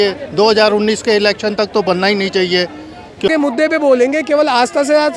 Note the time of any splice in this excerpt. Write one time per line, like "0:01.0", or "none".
0:03.3